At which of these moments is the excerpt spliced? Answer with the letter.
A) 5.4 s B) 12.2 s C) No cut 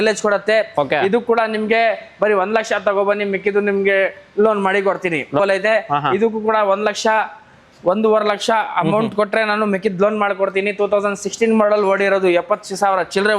A